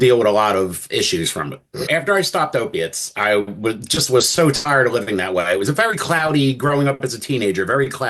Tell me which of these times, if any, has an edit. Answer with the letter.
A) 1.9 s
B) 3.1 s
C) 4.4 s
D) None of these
A